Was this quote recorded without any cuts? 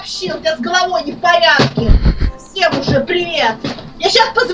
yes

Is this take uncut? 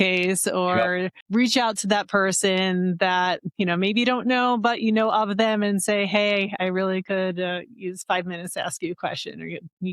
no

